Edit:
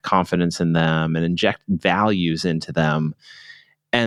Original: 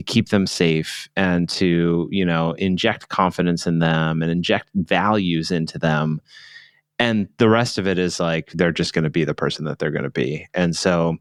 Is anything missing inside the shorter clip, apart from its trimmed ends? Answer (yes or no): no